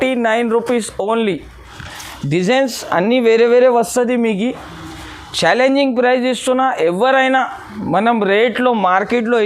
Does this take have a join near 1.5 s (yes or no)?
yes